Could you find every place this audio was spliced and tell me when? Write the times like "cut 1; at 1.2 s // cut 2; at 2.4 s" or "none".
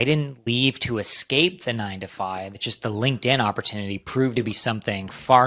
none

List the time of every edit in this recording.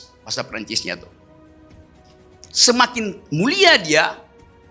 none

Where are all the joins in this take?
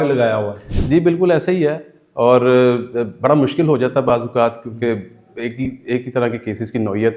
none

